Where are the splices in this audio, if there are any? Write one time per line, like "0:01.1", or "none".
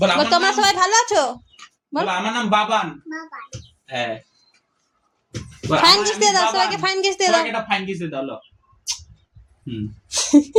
none